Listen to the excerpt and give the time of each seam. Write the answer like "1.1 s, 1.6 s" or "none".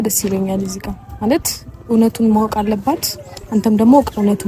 none

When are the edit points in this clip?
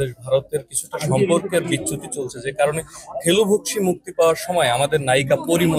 none

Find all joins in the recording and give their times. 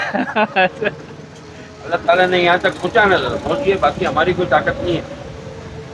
none

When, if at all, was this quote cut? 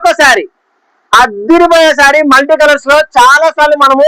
none

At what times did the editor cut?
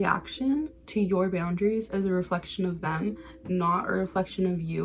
none

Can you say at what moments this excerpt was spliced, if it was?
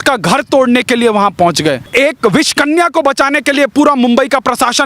1.8 s

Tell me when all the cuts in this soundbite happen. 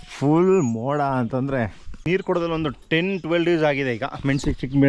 2.1 s

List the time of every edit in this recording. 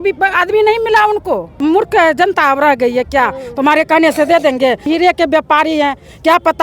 1.6 s, 4.9 s

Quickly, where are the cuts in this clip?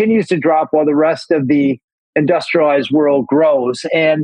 2.0 s

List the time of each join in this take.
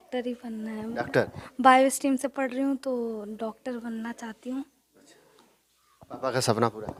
none

